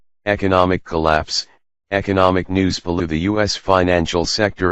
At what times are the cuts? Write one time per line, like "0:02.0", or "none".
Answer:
none